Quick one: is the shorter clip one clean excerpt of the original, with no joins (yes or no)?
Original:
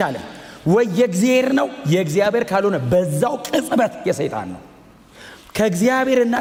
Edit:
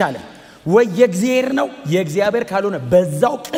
yes